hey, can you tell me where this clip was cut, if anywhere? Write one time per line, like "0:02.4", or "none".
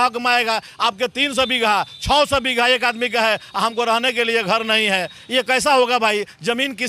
none